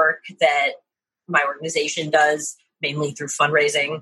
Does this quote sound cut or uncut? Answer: uncut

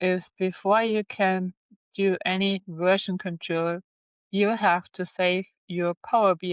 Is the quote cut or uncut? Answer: uncut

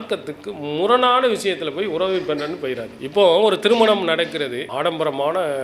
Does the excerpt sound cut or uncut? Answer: cut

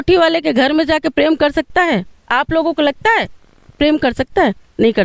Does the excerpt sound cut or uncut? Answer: uncut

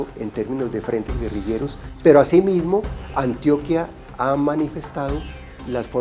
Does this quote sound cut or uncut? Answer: cut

